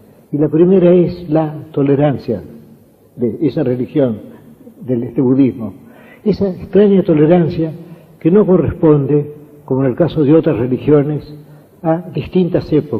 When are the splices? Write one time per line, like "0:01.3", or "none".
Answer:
none